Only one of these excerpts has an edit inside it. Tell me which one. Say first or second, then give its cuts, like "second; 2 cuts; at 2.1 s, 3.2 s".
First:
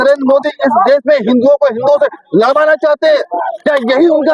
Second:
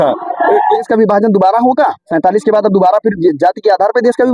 second; 2 cuts; at 0.9 s, 2.0 s